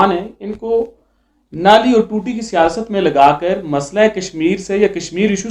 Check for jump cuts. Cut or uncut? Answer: uncut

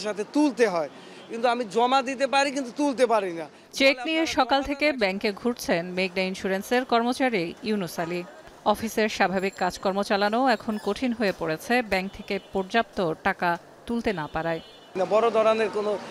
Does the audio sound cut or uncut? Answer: uncut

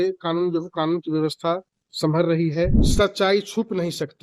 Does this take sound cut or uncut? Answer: cut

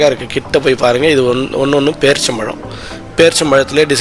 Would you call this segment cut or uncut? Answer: uncut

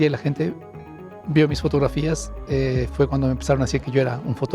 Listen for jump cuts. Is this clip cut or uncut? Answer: uncut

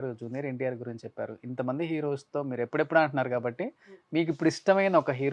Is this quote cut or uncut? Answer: uncut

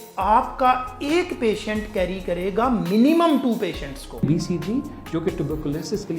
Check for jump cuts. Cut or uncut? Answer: cut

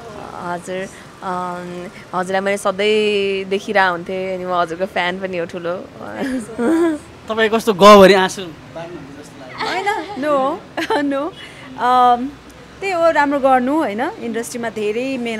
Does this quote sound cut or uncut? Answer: uncut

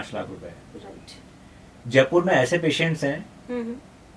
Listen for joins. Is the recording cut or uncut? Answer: uncut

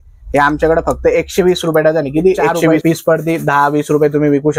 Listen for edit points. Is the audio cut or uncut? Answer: cut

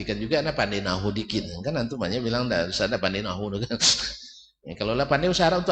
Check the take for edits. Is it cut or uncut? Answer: uncut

